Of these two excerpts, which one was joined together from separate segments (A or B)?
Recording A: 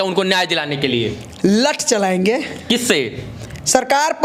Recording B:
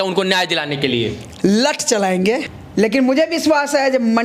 B